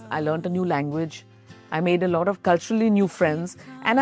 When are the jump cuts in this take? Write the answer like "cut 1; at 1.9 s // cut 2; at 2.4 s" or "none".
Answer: cut 1; at 2.4 s